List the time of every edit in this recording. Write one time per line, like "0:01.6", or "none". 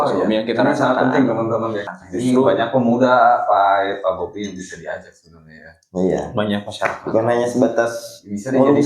0:01.9